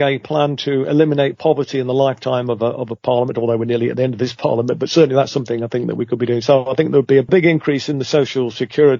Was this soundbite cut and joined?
yes; 1 cut; at 7.3 s

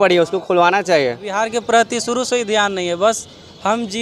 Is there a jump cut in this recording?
yes; 1 cut; at 1.4 s

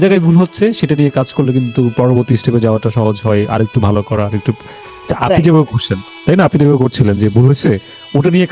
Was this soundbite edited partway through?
no; 0 cuts

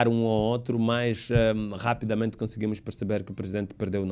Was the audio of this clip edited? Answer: no; 0 cuts

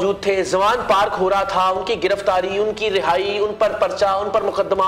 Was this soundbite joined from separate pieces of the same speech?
no; 0 cuts

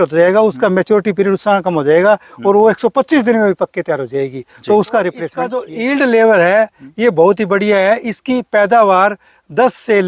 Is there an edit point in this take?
yes; 1 cut; at 5.5 s

